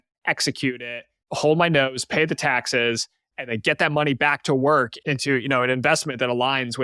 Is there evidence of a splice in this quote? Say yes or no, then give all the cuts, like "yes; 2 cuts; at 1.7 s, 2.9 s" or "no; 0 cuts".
no; 0 cuts